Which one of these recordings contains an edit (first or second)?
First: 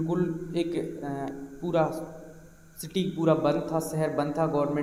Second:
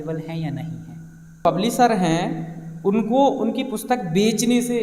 second